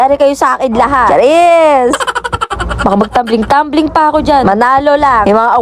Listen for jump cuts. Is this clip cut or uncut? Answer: uncut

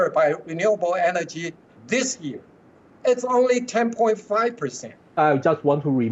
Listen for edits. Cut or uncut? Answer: cut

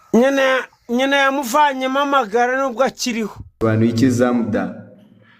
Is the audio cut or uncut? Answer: cut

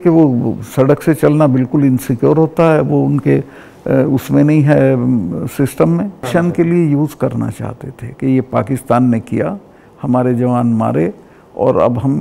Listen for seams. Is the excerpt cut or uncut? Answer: cut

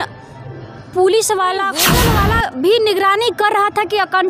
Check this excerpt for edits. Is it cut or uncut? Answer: cut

